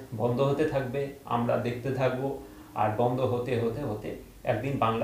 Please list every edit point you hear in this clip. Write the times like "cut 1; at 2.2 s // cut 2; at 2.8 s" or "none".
none